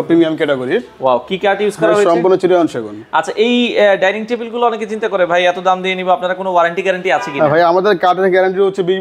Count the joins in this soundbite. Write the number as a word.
zero